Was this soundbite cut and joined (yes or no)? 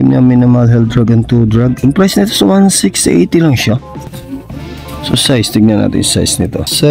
no